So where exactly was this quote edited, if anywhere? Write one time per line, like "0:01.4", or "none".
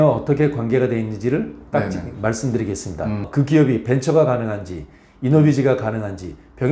0:03.3